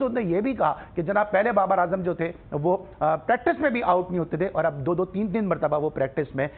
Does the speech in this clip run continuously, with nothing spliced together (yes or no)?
yes